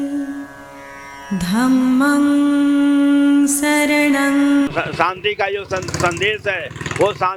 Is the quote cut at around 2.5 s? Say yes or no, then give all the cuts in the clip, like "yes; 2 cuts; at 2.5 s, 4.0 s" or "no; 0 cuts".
no; 1 cut; at 4.7 s